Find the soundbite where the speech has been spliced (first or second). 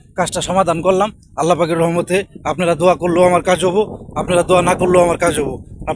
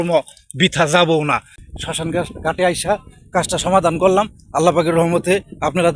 second